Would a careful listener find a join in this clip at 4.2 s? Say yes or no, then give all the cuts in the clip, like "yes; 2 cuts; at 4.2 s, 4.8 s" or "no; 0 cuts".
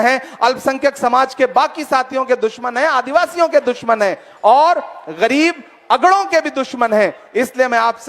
no; 0 cuts